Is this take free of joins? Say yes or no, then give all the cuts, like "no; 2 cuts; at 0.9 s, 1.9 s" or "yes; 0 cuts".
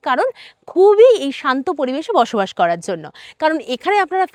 yes; 0 cuts